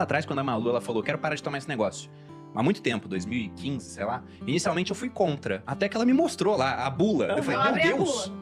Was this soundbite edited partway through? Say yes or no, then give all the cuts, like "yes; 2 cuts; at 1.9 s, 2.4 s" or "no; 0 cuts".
no; 0 cuts